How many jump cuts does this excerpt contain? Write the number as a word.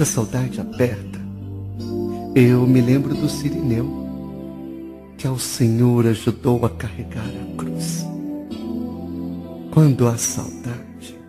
one